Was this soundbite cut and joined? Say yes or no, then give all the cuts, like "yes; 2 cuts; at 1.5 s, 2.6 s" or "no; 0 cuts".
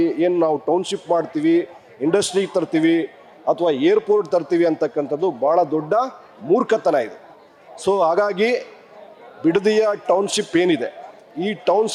no; 0 cuts